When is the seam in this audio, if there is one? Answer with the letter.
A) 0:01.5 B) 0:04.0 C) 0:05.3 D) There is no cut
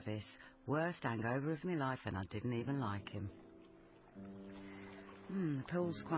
B